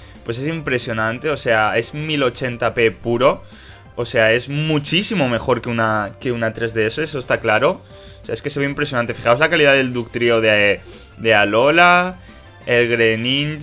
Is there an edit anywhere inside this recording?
yes; 1 cut; at 5.4 s

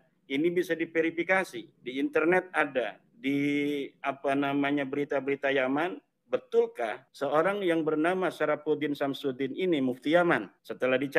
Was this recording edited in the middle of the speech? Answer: no; 0 cuts

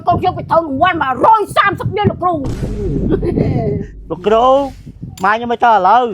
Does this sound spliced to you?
yes; 1 cut; at 3.9 s

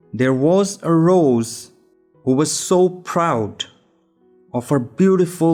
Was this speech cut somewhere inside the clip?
no; 0 cuts

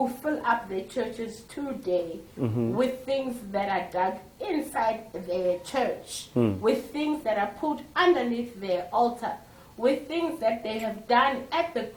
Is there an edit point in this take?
no; 0 cuts

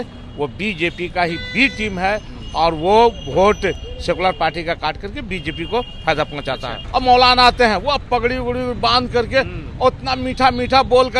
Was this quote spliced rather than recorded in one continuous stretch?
yes; 1 cut; at 6.7 s

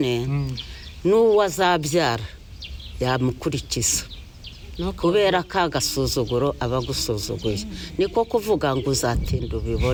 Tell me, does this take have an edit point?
no; 0 cuts

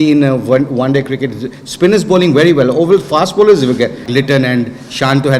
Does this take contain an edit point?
yes; 1 cut; at 4.0 s

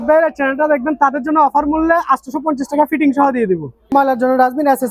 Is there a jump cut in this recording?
yes; 1 cut; at 3.9 s

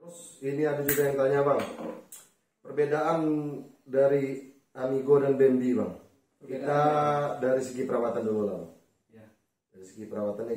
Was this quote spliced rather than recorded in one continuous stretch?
no; 0 cuts

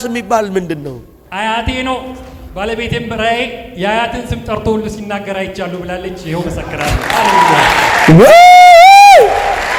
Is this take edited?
no; 0 cuts

